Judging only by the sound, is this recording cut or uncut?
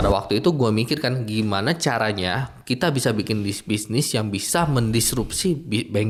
uncut